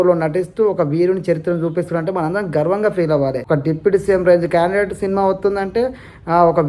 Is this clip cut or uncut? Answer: cut